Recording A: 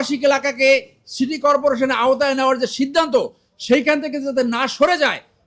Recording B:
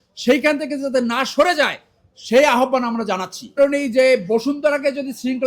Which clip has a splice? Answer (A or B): B